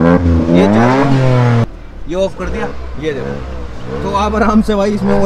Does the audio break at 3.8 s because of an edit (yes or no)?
no